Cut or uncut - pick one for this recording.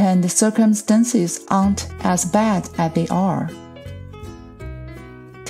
uncut